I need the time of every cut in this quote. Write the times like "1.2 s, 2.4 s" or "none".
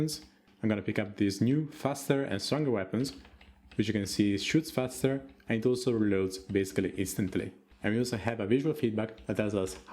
7.6 s